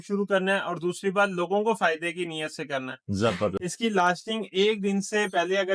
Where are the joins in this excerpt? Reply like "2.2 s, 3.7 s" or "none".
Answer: 3.6 s